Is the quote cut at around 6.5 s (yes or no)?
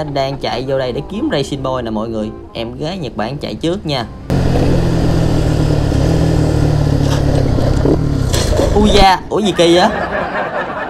no